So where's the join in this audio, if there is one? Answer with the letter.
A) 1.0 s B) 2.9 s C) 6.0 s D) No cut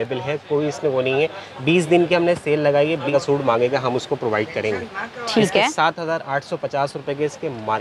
D